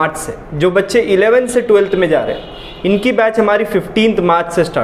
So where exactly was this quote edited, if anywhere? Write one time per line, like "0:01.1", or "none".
none

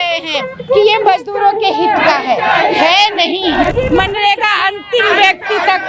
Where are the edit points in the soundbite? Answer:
0:03.7

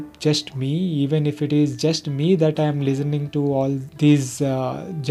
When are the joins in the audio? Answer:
none

